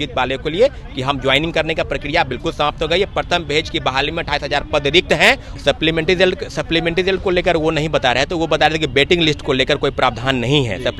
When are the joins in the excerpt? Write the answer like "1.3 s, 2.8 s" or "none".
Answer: 5.5 s